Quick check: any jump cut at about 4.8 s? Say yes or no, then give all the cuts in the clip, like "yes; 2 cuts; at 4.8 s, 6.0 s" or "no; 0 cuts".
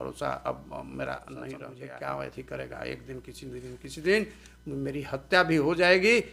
no; 1 cut; at 1.7 s